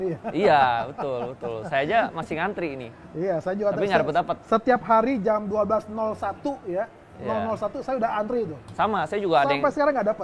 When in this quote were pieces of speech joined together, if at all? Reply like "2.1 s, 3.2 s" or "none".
none